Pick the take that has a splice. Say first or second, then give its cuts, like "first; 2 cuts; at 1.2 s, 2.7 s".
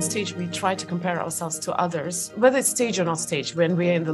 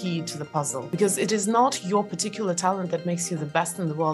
second; 1 cut; at 0.9 s